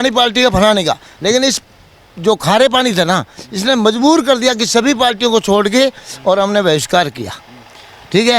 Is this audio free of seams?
yes; 0 cuts

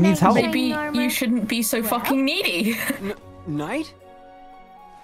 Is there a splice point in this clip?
no; 0 cuts

